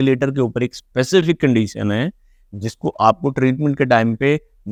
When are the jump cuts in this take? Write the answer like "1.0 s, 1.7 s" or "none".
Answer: none